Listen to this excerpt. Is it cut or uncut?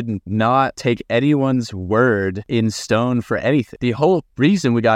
cut